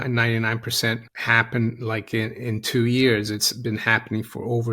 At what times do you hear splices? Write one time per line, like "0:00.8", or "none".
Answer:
0:01.1